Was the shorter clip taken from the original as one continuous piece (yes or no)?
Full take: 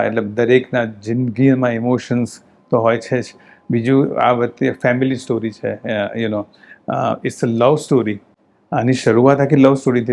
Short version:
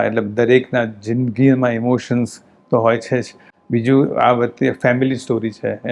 yes